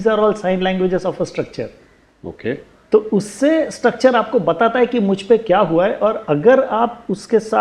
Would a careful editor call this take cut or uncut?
uncut